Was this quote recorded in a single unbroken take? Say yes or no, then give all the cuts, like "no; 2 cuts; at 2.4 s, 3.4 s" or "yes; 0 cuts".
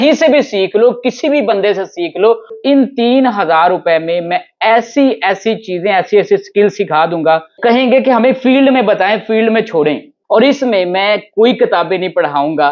no; 3 cuts; at 2.6 s, 7.6 s, 10.1 s